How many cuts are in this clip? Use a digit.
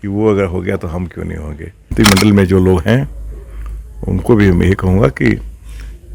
1